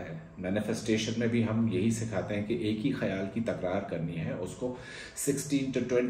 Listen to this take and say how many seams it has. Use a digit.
0